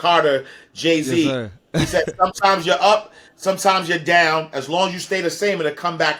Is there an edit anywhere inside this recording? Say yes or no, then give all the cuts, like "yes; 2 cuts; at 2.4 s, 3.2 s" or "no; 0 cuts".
no; 0 cuts